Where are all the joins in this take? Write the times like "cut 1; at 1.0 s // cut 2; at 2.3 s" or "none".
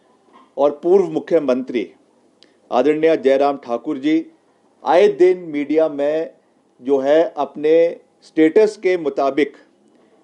none